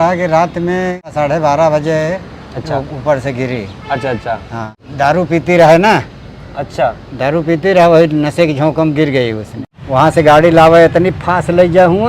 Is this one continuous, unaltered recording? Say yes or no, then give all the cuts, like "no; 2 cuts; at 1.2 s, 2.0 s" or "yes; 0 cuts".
no; 3 cuts; at 1.1 s, 4.8 s, 9.5 s